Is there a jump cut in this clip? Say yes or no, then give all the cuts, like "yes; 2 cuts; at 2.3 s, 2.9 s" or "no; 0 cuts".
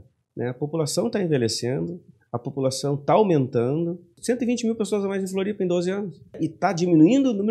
yes; 2 cuts; at 4.1 s, 6.4 s